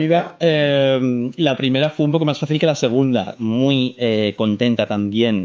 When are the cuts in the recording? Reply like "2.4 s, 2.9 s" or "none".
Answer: 3.3 s